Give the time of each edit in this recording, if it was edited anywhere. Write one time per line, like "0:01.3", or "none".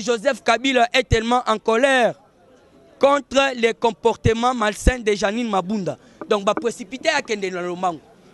none